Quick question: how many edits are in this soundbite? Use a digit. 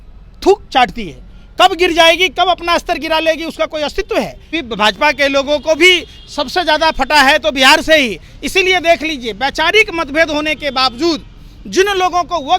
1